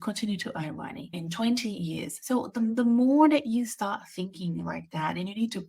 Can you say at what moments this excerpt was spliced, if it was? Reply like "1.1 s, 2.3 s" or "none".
1.2 s, 2.1 s